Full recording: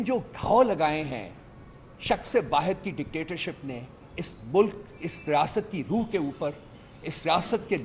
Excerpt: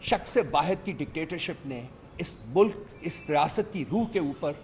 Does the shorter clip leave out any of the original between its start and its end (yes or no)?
no